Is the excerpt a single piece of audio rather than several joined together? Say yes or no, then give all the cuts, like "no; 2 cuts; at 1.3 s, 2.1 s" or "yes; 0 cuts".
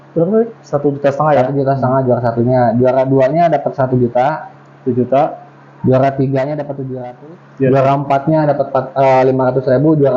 no; 1 cut; at 6.8 s